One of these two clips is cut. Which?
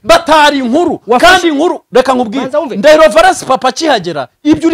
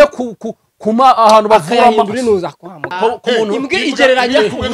second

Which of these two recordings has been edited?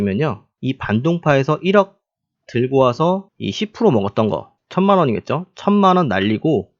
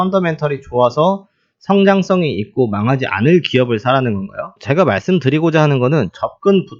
second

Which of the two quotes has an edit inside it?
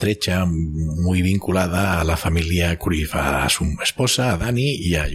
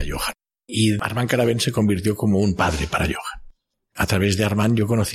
second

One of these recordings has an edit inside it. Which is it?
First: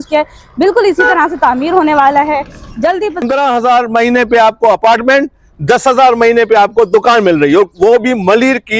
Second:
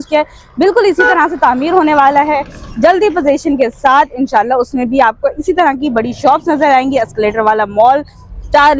first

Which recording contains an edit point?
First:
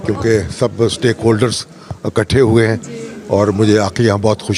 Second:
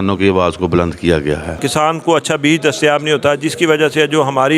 second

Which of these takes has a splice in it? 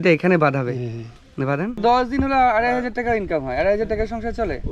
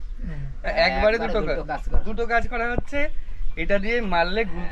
first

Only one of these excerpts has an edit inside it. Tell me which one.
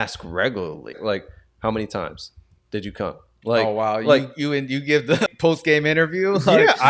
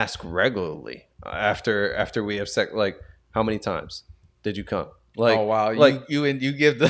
first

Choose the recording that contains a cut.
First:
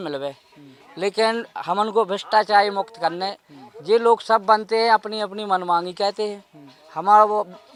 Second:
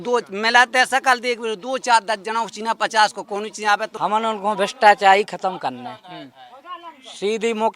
second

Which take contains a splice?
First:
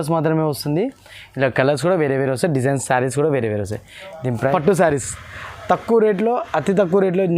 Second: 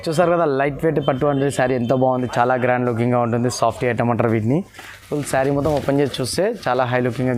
first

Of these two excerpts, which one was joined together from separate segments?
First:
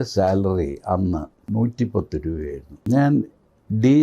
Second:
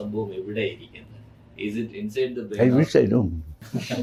first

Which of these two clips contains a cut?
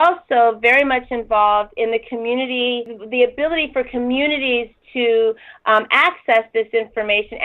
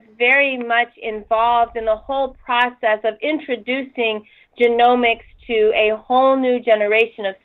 first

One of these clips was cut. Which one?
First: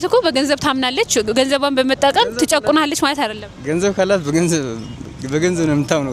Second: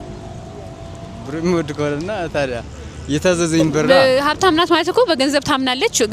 second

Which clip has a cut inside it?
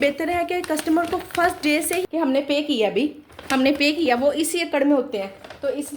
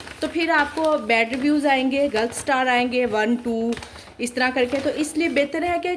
first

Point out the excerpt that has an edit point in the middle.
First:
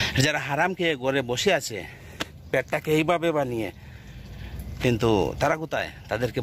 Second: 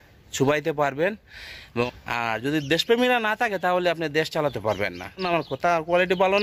second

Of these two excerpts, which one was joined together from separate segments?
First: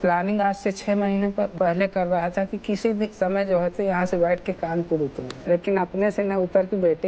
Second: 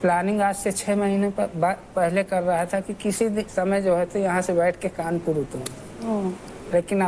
first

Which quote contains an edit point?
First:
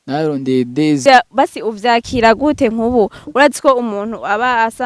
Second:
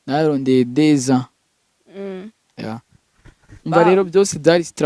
first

